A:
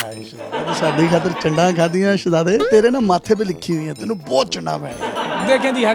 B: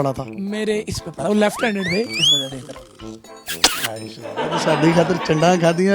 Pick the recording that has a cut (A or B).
B